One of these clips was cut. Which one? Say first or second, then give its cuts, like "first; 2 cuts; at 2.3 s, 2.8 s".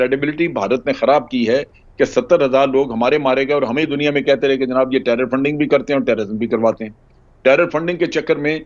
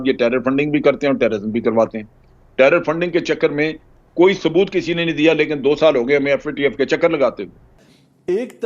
second; 1 cut; at 7.7 s